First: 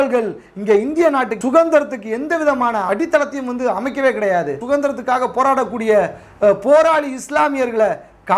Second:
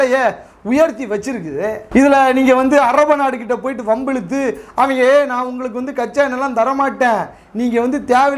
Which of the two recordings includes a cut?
first; 3 cuts; at 1.3 s, 2.9 s, 4.6 s

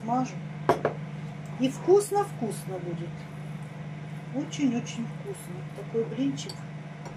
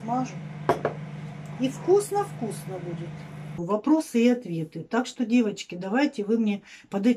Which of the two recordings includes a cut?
second; 1 cut; at 3.6 s

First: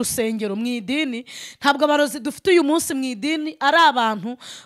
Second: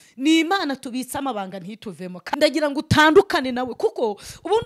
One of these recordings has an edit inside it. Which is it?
second; 1 cut; at 2.2 s

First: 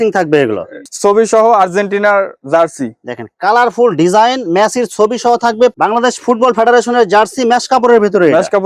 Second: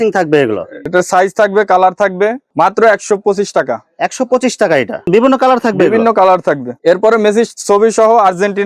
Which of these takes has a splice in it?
first; 2 cuts; at 0.9 s, 5.7 s

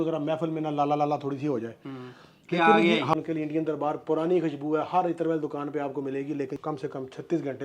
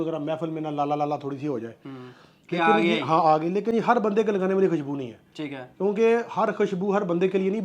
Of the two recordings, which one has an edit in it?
first; 2 cuts; at 3.1 s, 6.6 s

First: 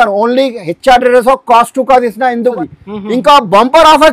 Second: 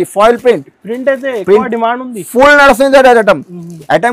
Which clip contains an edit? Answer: first; 1 cut; at 2.5 s

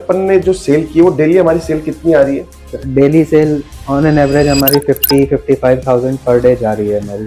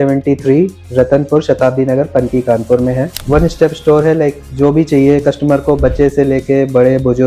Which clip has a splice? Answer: second; 1 cut; at 3.2 s

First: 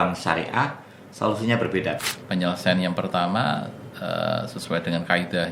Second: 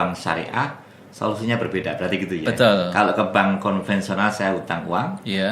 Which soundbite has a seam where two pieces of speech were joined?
first; 1 cut; at 2.0 s

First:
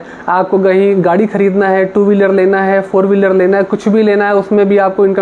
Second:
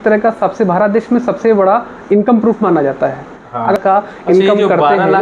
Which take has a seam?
second; 1 cut; at 3.8 s

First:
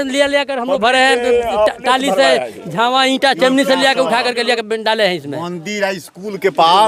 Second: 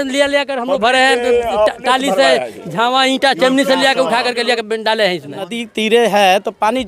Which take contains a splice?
second; 1 cut; at 5.6 s

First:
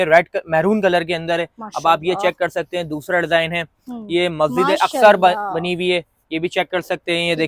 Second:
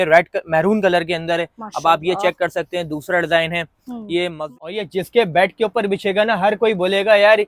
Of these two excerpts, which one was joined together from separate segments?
second; 1 cut; at 4.3 s

